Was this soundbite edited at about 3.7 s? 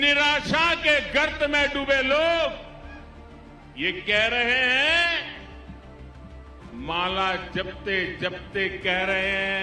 no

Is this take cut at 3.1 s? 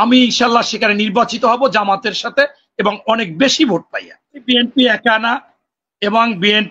no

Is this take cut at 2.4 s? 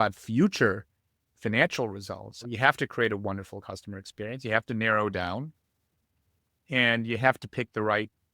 yes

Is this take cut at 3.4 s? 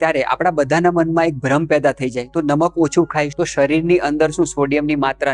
yes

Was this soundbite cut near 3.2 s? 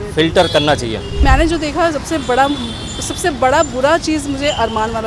no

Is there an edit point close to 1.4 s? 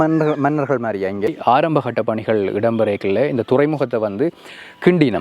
yes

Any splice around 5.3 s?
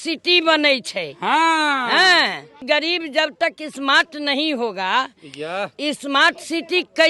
no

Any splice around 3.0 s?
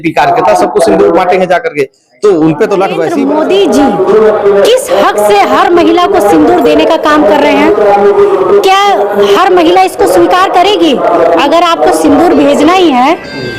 yes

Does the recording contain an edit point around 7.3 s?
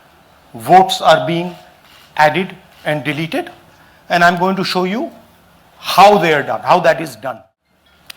yes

